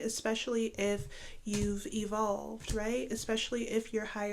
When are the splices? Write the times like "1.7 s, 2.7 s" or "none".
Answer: none